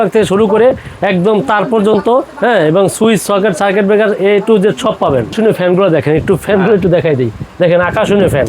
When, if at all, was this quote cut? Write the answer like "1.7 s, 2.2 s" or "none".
5.3 s

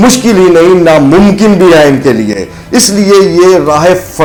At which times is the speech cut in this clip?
none

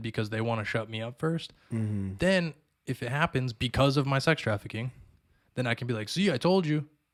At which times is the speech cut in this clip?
none

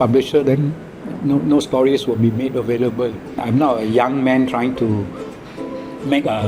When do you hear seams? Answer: 3.4 s

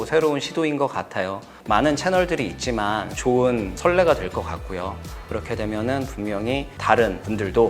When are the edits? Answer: 3.1 s, 5.2 s

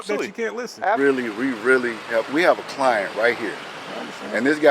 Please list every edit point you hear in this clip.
1.0 s

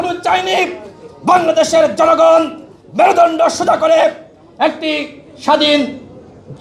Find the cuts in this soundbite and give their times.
none

